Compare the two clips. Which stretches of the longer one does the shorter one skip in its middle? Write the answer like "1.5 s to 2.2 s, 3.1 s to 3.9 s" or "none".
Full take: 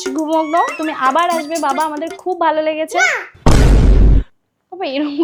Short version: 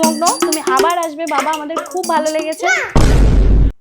3.1 s to 3.3 s